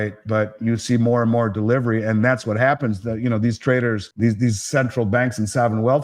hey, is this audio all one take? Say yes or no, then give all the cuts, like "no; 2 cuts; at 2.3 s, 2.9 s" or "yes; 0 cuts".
no; 1 cut; at 4.1 s